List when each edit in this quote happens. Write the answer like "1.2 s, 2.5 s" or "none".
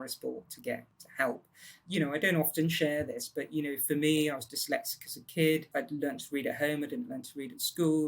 1.0 s, 1.8 s, 5.7 s